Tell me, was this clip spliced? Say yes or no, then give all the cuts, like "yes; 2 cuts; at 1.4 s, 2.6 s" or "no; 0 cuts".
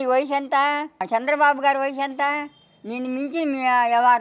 yes; 1 cut; at 1.1 s